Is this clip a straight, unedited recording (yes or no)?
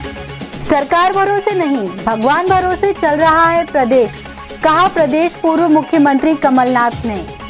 yes